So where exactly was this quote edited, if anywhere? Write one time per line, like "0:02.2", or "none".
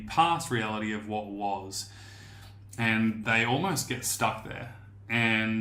none